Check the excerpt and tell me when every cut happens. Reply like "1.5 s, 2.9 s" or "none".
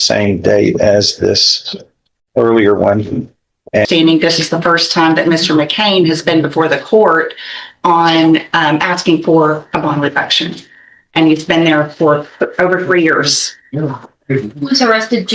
3.9 s